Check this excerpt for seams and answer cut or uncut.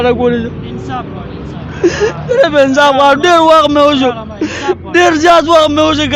uncut